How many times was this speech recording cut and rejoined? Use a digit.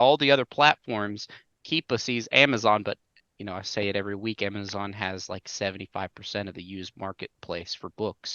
0